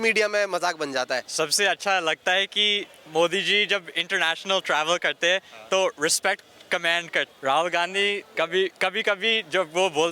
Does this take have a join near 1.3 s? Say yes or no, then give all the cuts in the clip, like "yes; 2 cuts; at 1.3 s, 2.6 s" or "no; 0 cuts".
yes; 3 cuts; at 1.3 s, 7.3 s, 8.3 s